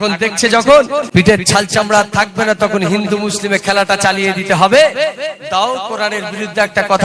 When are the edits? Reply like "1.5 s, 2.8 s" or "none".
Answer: 1.0 s